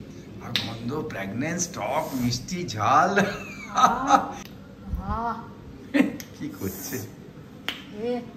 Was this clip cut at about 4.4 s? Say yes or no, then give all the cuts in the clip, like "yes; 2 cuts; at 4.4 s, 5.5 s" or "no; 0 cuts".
yes; 1 cut; at 4.4 s